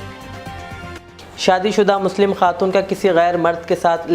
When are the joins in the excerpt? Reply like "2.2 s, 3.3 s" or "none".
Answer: 0.9 s